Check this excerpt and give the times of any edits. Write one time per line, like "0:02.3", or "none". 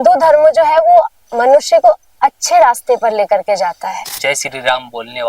0:04.1